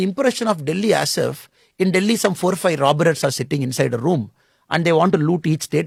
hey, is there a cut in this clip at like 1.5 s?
no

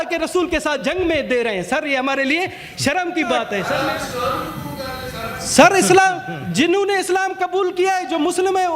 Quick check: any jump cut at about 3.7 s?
yes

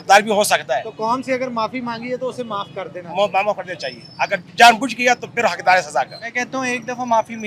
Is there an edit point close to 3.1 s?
no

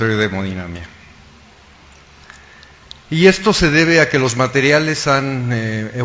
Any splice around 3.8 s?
no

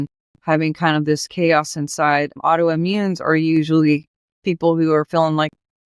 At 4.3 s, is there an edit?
no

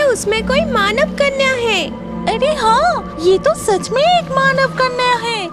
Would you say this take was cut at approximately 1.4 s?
no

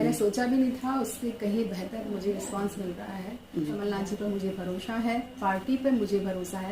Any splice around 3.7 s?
yes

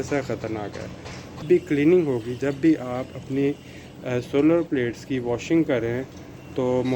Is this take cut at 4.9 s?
no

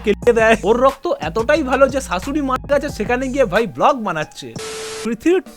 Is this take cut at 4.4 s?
yes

